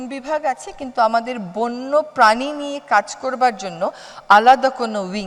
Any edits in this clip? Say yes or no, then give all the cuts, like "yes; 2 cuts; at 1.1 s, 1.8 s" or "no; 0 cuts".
no; 0 cuts